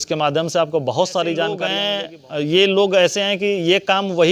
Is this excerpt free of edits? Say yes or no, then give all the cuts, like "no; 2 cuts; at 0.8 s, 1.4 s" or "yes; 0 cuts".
no; 1 cut; at 1.8 s